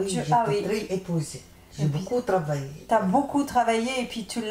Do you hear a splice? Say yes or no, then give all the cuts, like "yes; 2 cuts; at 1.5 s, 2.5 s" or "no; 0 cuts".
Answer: no; 0 cuts